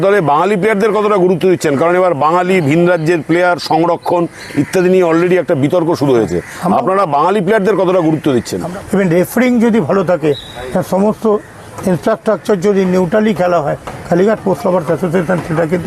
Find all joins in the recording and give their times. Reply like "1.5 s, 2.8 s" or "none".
8.6 s